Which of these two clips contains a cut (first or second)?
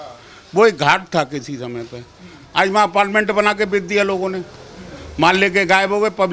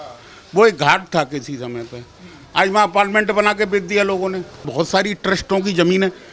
second